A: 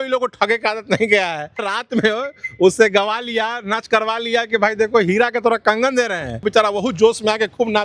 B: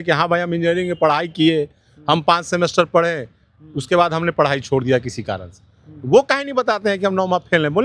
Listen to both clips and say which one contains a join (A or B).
A